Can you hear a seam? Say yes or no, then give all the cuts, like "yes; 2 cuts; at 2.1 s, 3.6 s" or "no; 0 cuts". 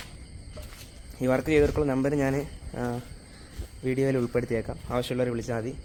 no; 0 cuts